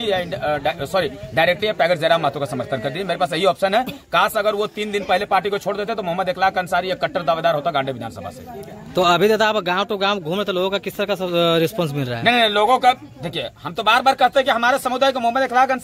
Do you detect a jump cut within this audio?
no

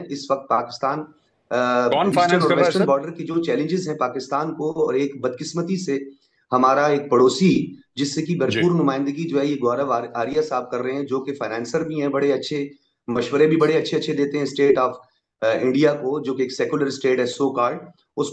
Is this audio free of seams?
yes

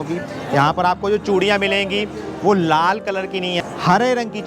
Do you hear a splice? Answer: yes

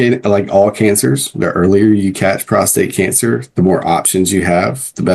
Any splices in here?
no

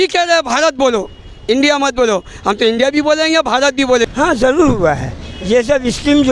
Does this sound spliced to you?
yes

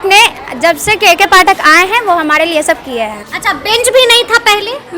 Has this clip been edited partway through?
yes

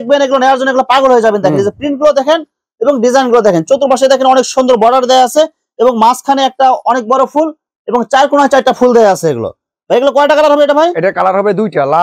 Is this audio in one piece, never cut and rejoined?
yes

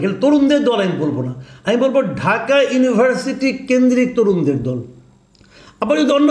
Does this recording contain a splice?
no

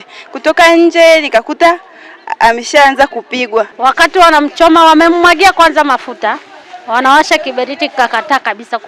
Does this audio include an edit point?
yes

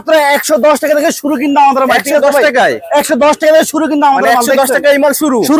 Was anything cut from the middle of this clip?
no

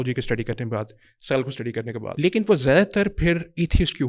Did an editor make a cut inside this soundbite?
yes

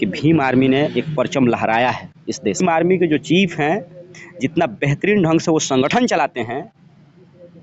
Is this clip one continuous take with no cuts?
no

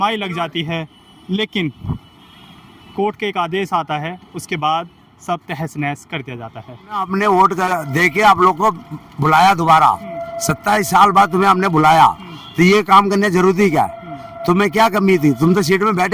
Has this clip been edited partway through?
yes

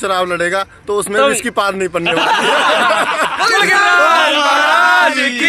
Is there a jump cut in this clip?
no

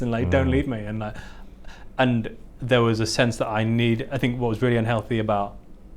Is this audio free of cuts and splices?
yes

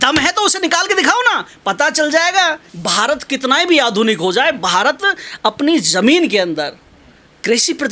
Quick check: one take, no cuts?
no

